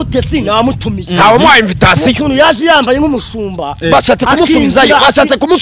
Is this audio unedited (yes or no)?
yes